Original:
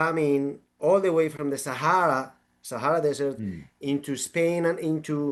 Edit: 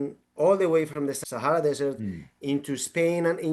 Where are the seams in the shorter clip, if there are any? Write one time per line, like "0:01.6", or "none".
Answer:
0:01.2